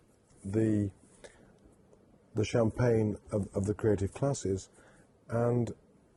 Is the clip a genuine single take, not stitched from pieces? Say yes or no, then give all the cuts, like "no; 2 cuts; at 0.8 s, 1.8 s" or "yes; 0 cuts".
yes; 0 cuts